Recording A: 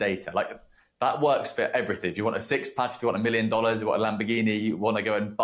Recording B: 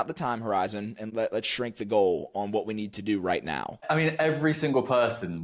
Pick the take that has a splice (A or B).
B